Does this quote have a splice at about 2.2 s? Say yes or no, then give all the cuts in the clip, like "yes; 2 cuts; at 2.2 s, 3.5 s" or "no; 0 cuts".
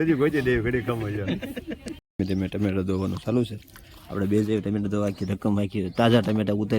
yes; 1 cut; at 2.2 s